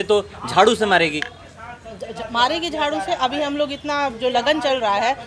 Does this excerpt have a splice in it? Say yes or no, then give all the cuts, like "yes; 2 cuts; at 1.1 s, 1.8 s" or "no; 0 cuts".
no; 0 cuts